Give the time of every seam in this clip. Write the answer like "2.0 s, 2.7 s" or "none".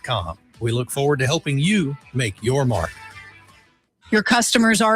4.0 s

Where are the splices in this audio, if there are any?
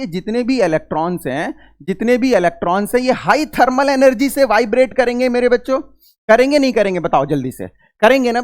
none

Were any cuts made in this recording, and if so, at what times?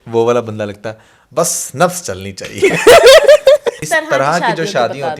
3.9 s

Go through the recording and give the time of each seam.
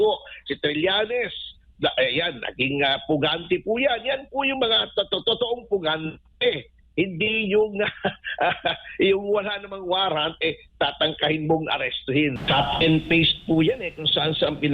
12.4 s

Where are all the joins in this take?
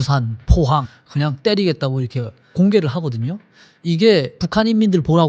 0.9 s, 2.5 s, 4.4 s

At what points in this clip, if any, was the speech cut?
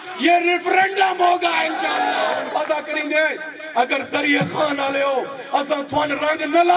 2.5 s

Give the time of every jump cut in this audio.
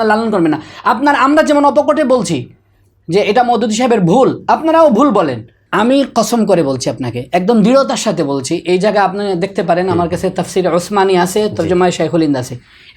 5.6 s

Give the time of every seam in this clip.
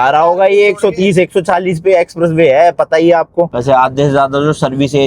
3.5 s

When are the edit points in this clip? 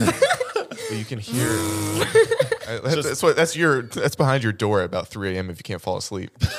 2.7 s

